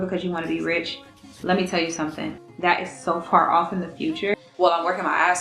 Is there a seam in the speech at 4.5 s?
yes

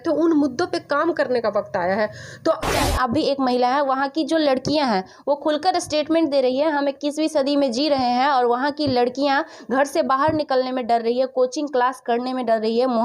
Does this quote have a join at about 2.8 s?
yes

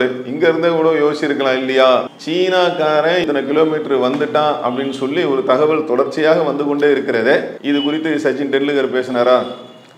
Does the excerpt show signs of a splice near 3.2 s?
yes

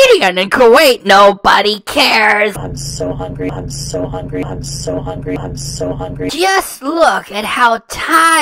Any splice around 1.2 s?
no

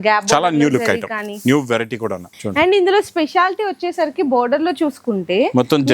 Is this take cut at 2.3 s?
yes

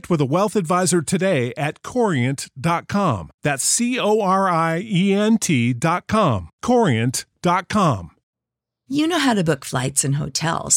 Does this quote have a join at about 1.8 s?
no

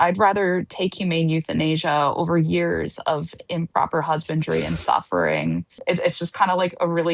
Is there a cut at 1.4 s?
no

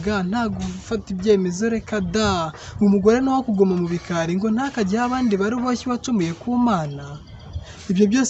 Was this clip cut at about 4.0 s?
no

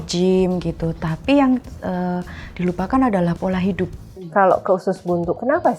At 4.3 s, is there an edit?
yes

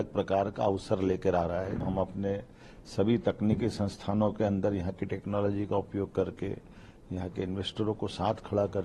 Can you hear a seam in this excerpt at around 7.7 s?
no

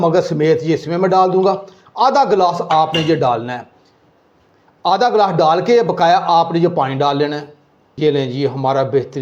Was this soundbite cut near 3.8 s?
no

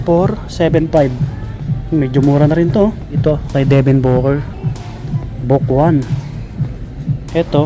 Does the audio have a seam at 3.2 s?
yes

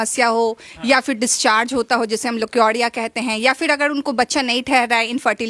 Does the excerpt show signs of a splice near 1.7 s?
no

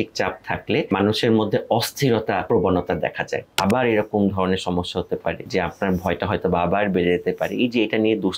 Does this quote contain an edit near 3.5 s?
yes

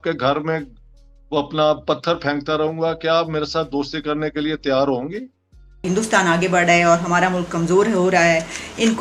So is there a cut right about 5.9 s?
yes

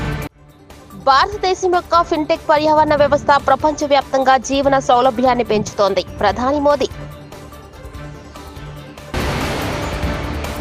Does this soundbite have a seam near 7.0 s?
yes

